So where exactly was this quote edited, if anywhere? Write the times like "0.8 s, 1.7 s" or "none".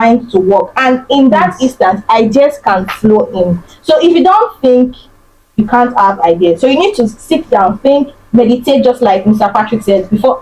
none